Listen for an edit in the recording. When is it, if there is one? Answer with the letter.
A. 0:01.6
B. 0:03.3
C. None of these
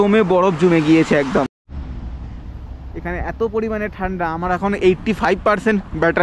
A